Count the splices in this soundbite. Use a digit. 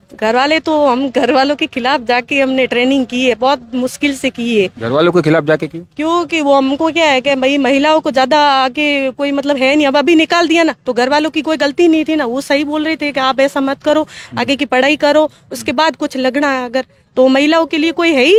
0